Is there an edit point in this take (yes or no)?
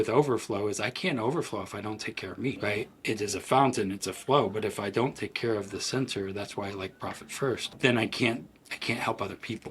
yes